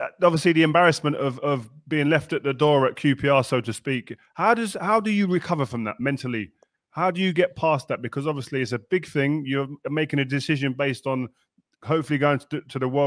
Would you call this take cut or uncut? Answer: uncut